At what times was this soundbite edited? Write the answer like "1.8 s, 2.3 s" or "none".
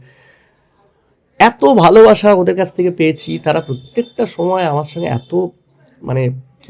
none